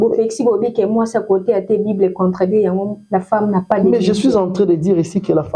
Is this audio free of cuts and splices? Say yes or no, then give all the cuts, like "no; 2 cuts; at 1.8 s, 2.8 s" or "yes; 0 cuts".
yes; 0 cuts